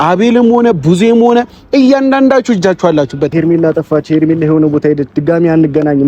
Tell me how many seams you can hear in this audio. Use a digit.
1